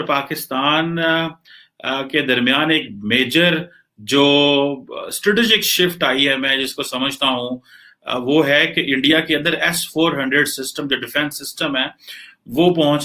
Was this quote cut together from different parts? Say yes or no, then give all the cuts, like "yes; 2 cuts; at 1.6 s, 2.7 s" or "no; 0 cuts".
no; 0 cuts